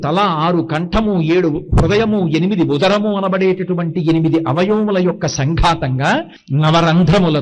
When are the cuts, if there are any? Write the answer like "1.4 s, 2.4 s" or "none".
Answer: 6.4 s